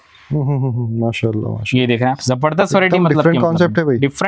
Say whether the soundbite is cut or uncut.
uncut